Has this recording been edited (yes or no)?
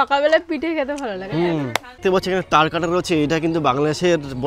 yes